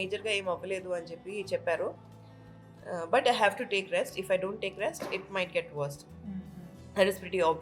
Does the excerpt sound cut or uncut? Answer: uncut